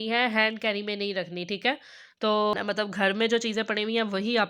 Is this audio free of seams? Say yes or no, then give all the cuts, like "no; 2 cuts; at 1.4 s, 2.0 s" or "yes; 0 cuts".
no; 1 cut; at 2.5 s